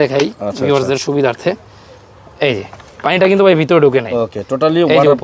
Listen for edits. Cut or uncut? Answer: uncut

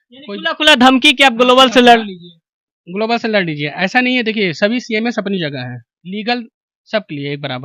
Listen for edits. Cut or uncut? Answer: uncut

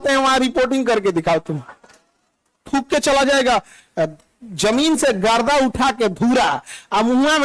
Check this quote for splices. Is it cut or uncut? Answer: cut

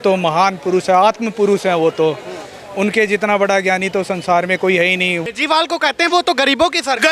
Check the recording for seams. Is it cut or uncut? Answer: cut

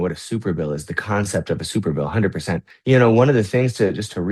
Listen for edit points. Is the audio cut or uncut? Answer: cut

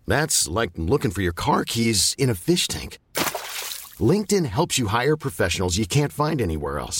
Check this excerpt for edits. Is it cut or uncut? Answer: uncut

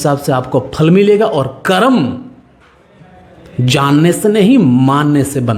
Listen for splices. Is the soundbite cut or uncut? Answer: uncut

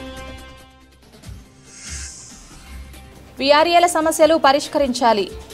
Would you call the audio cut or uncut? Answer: cut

